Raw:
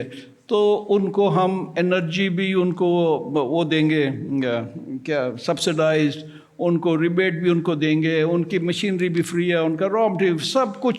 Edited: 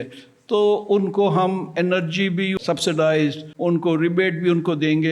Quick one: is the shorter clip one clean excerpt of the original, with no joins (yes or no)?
no